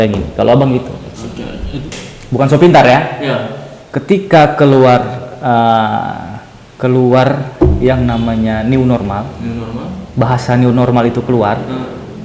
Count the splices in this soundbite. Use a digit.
1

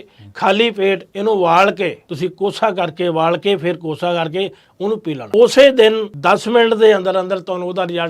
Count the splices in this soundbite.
3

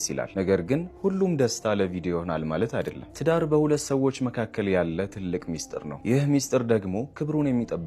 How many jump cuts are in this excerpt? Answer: 0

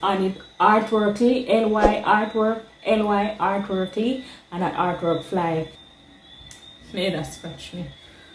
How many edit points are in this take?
1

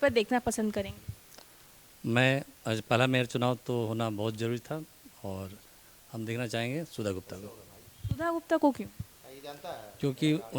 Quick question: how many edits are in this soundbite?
0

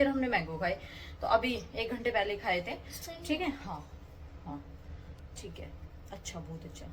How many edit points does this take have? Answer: 0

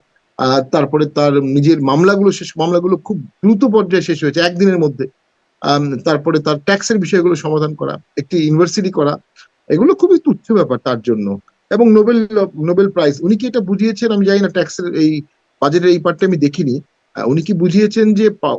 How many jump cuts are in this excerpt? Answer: 0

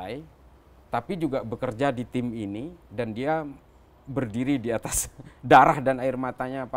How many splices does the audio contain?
0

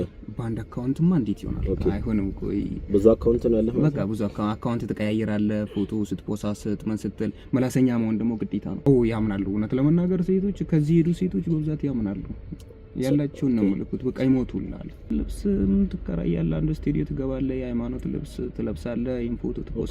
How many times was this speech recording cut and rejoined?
2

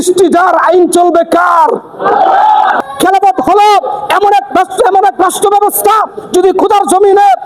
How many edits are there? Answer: 1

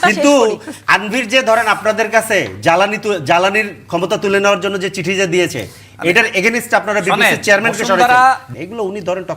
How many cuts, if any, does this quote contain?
1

